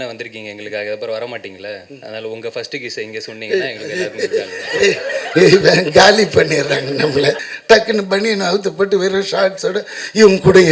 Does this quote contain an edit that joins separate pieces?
yes; 1 cut; at 7.5 s

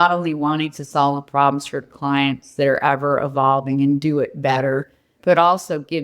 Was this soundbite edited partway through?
yes; 1 cut; at 5.1 s

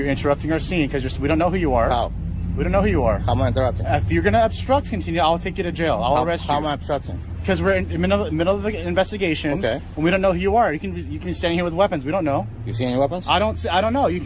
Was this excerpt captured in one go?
yes; 0 cuts

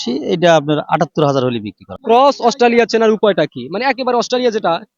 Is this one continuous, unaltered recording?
no; 1 cut; at 2.0 s

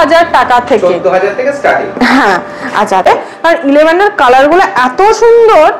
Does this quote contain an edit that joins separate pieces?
yes; 1 cut; at 3.1 s

